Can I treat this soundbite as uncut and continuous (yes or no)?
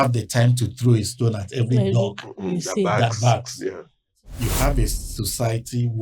no